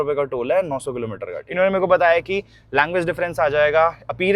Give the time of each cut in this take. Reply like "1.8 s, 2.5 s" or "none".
1.4 s